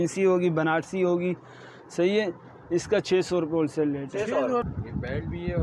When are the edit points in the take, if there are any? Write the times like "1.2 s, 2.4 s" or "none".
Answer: 4.6 s